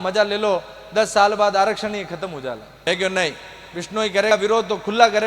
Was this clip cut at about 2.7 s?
yes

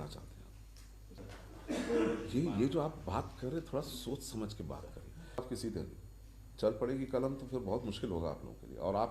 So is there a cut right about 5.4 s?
yes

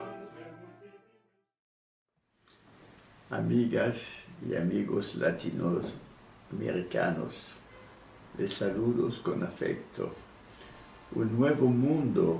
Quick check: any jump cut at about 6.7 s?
no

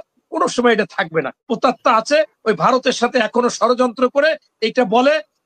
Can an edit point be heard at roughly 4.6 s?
no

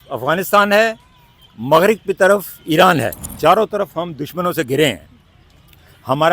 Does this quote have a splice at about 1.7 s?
no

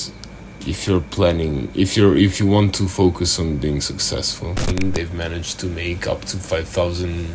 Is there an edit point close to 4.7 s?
yes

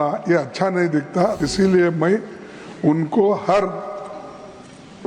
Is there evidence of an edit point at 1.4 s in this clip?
yes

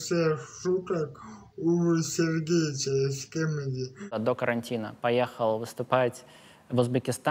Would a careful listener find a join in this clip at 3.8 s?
yes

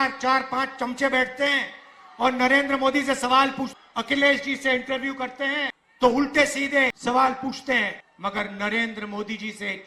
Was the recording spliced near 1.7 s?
no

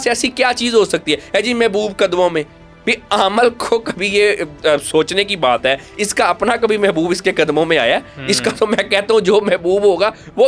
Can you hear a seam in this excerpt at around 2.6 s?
no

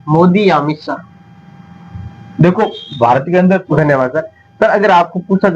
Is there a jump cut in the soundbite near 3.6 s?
yes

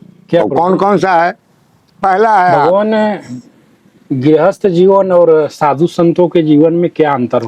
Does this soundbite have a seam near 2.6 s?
yes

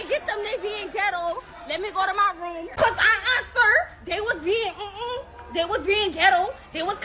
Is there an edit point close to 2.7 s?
yes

